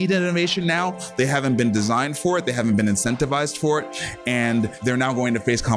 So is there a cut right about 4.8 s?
yes; 1 cut; at 4.8 s

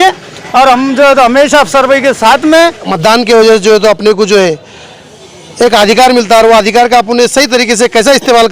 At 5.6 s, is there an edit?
no; 1 cut; at 2.9 s

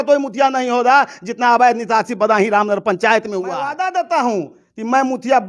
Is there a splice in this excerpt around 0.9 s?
no; 1 cut; at 3.7 s

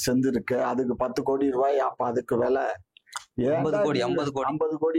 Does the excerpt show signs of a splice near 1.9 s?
no; 0 cuts

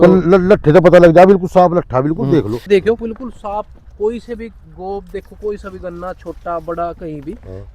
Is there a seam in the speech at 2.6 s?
yes; 1 cut; at 2.6 s

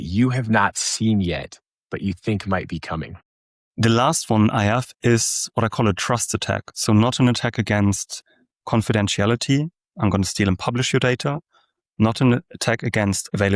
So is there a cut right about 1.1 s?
no; 1 cut; at 3.1 s

